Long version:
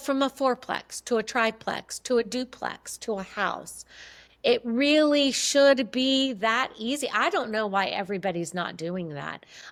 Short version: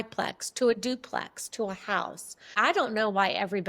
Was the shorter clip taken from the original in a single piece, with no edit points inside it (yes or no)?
no